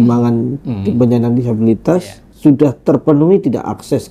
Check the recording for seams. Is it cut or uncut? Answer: cut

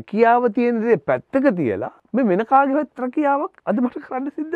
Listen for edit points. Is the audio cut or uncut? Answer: cut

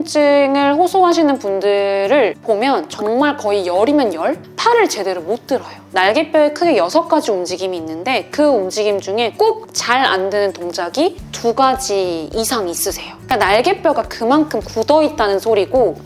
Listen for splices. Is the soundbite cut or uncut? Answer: uncut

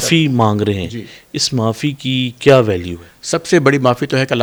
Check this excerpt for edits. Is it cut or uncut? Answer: uncut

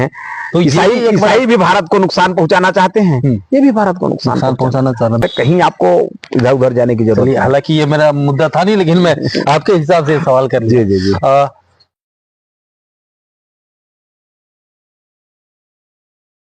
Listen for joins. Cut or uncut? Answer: uncut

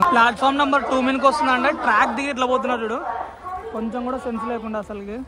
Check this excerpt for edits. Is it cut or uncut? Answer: uncut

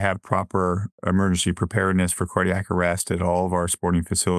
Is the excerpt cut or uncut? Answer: uncut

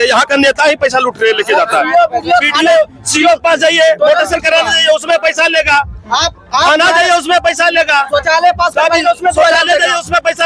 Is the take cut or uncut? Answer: uncut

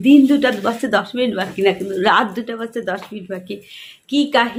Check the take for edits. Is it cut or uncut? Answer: uncut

